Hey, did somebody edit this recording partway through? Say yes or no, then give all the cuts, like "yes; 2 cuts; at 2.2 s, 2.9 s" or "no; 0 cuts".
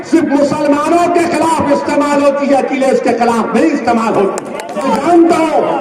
yes; 1 cut; at 4.8 s